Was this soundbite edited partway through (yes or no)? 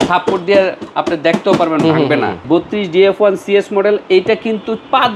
yes